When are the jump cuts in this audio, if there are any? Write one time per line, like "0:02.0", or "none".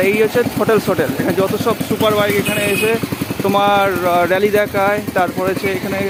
none